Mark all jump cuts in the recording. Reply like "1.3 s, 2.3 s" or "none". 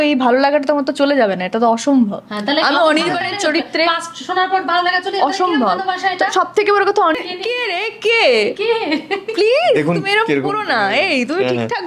7.2 s